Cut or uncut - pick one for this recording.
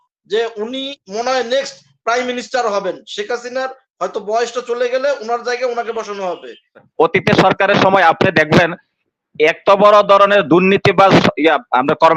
cut